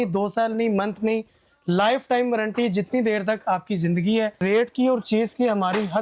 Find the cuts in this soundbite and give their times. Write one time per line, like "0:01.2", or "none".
0:04.4